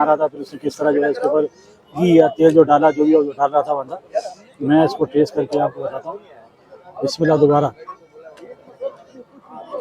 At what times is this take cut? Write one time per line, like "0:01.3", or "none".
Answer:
none